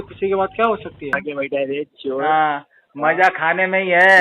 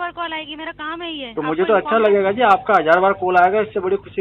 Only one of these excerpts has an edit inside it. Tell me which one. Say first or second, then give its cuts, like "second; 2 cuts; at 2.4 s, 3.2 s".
first; 1 cut; at 1.2 s